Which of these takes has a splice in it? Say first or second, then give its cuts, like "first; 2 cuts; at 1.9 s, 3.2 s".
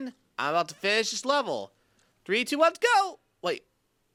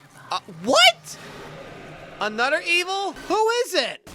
second; 1 cut; at 3.2 s